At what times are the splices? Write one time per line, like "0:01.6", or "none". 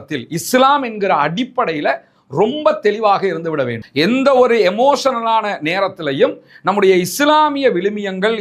none